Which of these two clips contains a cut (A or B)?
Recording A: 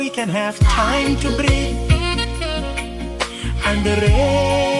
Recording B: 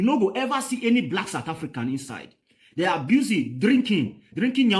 B